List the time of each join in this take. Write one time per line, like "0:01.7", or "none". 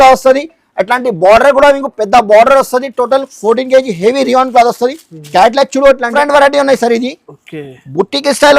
0:06.1